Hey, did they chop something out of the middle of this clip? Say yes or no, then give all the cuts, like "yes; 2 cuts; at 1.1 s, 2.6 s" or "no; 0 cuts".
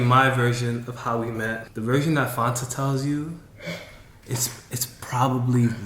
yes; 1 cut; at 1.7 s